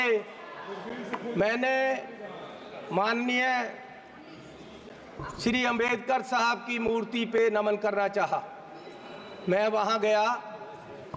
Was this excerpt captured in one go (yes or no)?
yes